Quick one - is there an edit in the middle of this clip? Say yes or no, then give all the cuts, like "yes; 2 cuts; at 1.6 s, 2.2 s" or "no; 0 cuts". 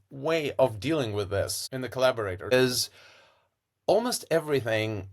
yes; 2 cuts; at 1.6 s, 2.5 s